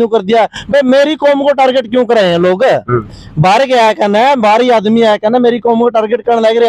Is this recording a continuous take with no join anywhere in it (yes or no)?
yes